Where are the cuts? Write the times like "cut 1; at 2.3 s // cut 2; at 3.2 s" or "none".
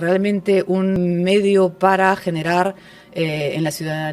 cut 1; at 1.0 s